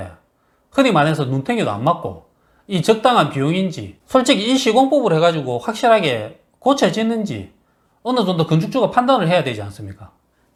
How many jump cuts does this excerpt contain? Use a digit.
0